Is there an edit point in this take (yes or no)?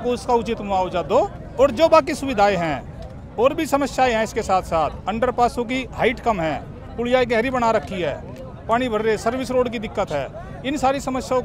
no